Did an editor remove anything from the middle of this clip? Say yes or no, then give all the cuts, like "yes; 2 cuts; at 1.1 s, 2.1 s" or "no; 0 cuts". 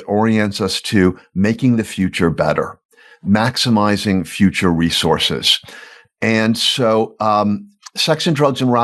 no; 0 cuts